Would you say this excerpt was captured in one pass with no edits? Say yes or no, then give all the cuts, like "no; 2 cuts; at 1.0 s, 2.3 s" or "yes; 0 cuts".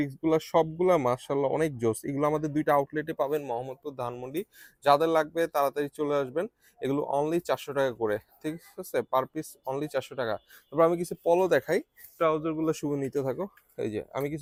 yes; 0 cuts